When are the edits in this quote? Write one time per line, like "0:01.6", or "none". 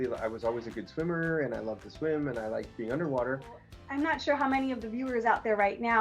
0:03.8